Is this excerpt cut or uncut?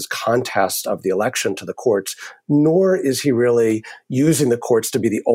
uncut